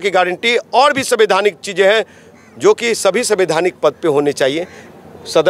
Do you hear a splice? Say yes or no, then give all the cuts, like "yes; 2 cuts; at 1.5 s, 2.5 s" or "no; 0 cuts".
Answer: no; 0 cuts